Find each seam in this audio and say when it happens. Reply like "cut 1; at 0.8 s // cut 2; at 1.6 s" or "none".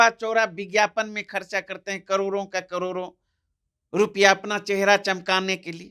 none